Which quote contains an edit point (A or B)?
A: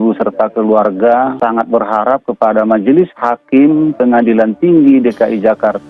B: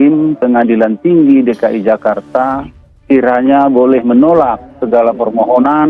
A